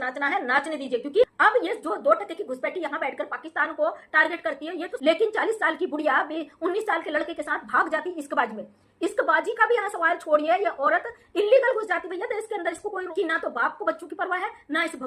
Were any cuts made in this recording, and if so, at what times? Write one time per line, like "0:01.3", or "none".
0:01.2
0:04.9
0:13.1